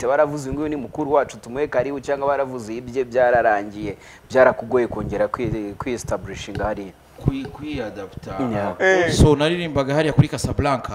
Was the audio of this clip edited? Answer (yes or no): yes